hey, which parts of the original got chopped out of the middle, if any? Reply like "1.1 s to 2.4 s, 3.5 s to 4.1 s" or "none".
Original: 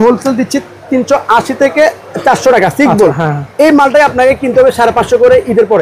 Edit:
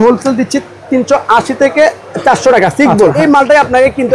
3.2 s to 3.6 s